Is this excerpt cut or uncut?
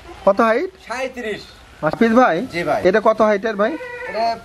cut